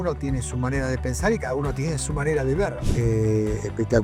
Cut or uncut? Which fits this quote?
cut